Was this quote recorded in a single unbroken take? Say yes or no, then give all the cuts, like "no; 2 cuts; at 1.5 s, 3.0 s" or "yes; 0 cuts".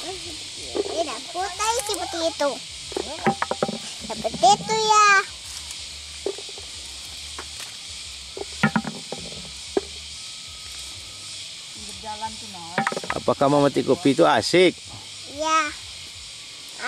yes; 0 cuts